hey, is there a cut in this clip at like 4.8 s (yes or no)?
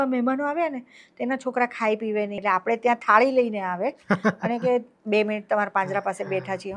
no